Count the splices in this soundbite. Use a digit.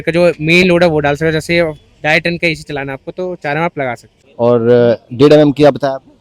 1